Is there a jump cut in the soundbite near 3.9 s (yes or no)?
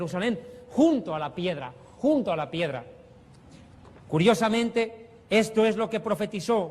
yes